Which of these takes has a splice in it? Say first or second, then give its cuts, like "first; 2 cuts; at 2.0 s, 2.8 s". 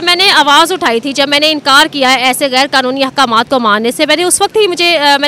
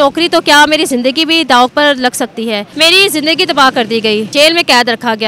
second; 2 cuts; at 2.7 s, 4.3 s